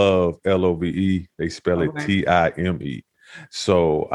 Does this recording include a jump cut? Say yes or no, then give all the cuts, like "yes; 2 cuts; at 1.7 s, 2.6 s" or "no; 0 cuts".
no; 0 cuts